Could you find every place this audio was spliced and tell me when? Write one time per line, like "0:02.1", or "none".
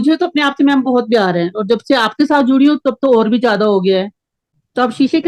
none